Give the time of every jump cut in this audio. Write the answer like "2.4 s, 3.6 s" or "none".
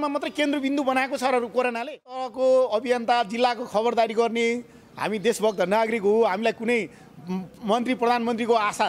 2.3 s

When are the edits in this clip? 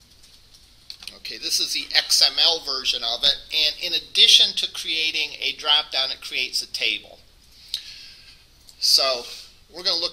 5.6 s

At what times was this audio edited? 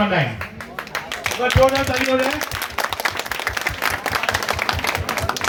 none

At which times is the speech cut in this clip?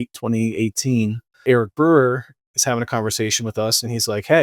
1.4 s

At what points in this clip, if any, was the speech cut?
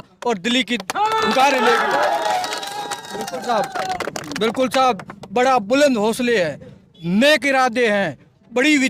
none

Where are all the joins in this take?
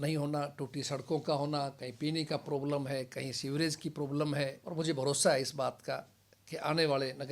4.6 s

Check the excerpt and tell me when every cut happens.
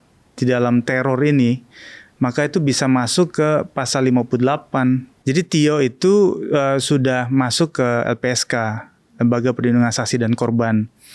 5.1 s

